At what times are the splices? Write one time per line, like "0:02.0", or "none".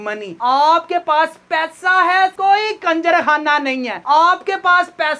none

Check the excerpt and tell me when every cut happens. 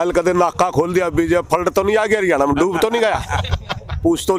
none

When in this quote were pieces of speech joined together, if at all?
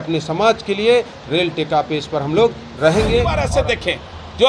0:03.4

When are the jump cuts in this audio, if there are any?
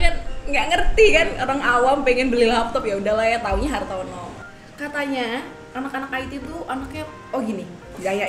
0:04.3

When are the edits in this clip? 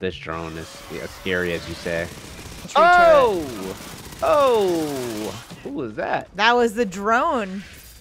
0:02.5

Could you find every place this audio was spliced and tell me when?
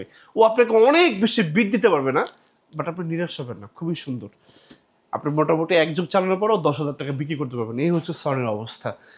none

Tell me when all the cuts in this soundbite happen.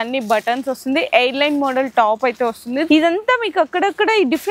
0:02.9

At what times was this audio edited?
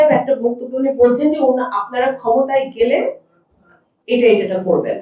none

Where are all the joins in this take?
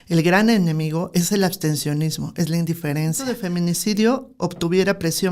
0:03.4

